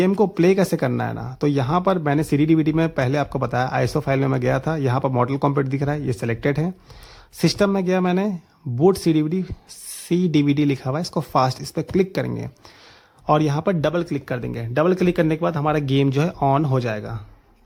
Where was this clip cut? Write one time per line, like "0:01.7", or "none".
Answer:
none

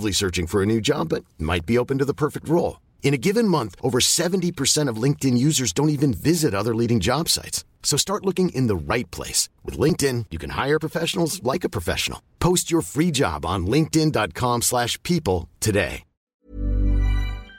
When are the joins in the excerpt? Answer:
0:16.3

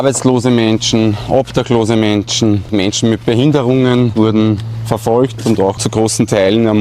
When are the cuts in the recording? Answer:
0:02.7
0:04.1
0:05.8

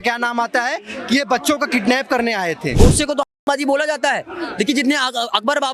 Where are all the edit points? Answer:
0:02.7

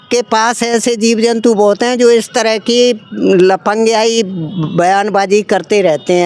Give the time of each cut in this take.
none

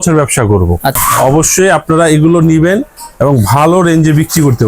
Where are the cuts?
0:01.0

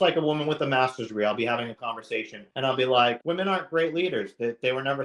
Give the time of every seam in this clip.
0:02.4
0:03.2

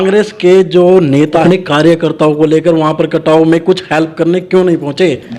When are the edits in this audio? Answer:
0:01.4

